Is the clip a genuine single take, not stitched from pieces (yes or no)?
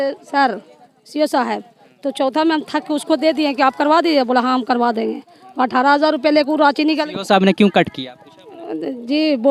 yes